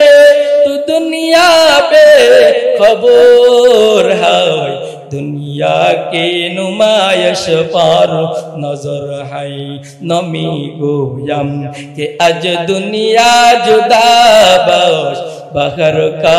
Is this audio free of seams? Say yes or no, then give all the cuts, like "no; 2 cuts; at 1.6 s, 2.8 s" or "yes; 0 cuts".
yes; 0 cuts